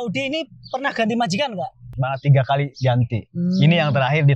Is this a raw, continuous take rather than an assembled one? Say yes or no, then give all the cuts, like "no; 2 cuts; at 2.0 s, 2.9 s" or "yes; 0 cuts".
no; 1 cut; at 1.9 s